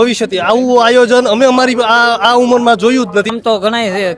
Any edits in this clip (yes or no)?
yes